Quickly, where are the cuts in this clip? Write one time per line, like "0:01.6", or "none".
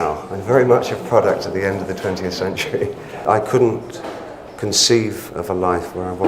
0:03.2